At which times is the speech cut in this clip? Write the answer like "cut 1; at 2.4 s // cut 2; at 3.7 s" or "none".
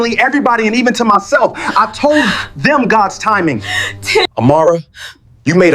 cut 1; at 4.3 s